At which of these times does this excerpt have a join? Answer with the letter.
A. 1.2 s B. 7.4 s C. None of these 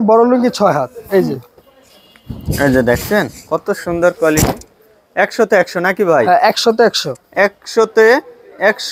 C